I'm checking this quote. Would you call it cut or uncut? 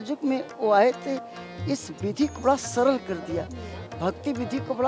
uncut